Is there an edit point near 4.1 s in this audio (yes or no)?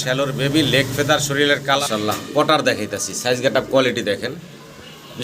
no